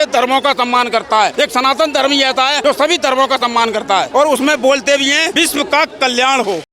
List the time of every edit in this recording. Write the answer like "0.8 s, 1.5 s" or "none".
1.3 s, 2.6 s, 4.1 s, 5.3 s